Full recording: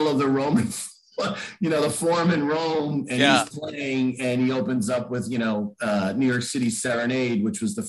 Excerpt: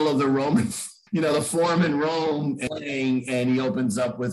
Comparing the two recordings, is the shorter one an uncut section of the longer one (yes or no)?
no